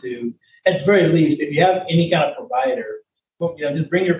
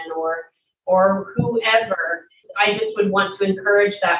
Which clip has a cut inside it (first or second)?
second